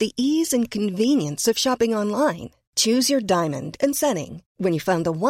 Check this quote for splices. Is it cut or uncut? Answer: uncut